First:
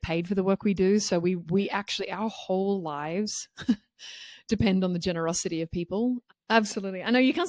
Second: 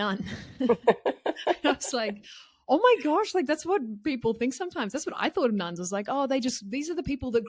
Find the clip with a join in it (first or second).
first